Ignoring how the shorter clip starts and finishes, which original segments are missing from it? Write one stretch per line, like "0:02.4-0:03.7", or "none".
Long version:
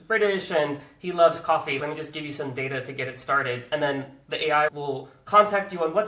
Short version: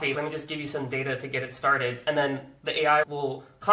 none